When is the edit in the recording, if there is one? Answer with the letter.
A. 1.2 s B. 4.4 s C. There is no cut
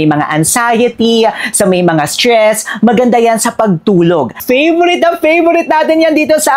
B